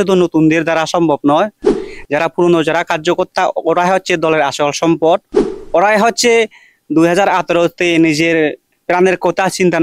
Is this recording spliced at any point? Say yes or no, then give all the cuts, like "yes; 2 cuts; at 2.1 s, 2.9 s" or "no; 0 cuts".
no; 0 cuts